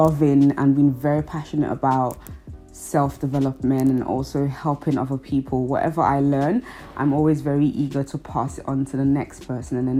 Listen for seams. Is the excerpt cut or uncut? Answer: uncut